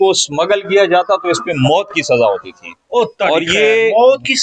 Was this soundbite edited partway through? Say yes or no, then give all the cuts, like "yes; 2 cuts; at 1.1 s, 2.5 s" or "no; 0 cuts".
no; 0 cuts